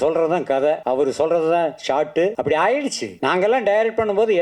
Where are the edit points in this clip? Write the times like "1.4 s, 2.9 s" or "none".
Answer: 0.8 s, 2.4 s, 3.1 s